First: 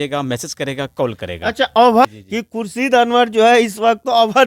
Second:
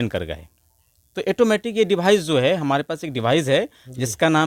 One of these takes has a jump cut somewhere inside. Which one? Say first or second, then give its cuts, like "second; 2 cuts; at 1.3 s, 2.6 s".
first; 1 cut; at 2.1 s